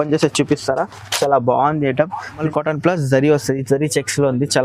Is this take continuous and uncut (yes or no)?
no